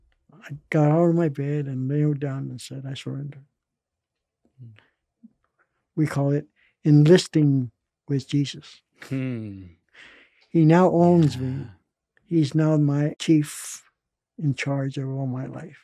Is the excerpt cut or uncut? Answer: cut